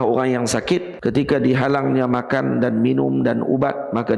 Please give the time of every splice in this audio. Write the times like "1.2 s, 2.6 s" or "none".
0.9 s